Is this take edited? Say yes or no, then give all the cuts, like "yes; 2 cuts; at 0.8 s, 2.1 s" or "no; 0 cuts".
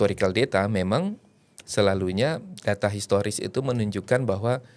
no; 0 cuts